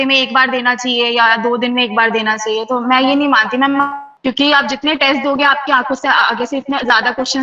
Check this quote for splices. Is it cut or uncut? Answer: uncut